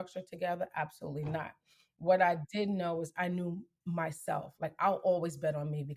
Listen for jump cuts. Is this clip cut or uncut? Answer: uncut